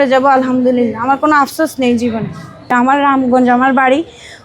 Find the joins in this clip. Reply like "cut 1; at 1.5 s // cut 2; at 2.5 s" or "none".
cut 1; at 2.5 s